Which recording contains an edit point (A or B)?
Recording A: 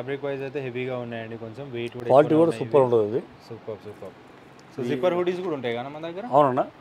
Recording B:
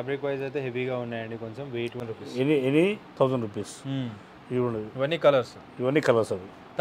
B